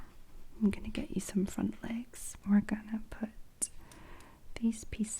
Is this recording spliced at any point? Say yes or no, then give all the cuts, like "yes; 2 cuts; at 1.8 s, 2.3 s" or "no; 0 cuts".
yes; 1 cut; at 2.2 s